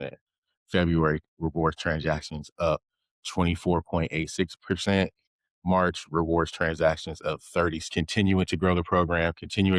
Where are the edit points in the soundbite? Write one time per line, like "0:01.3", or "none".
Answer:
0:07.8